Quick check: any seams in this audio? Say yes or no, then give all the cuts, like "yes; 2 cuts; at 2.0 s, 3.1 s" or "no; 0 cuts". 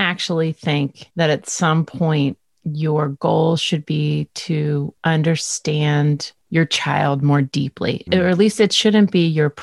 yes; 4 cuts; at 1.0 s, 4.9 s, 6.3 s, 8.1 s